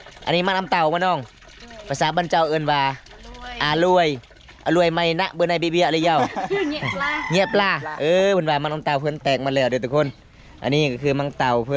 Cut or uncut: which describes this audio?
uncut